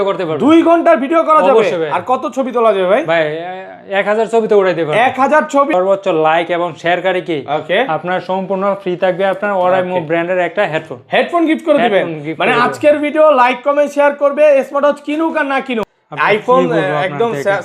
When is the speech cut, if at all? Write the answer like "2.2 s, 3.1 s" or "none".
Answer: 5.7 s, 16.0 s